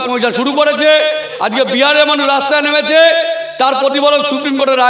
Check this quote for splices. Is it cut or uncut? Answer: cut